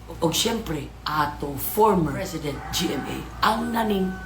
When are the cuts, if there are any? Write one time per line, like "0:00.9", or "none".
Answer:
0:02.2